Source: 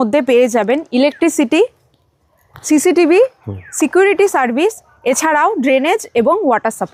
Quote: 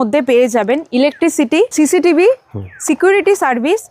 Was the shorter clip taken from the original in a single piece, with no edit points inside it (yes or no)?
no